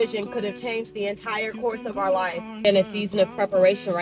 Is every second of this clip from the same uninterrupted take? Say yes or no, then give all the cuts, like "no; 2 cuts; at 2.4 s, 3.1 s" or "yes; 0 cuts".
no; 1 cut; at 2.6 s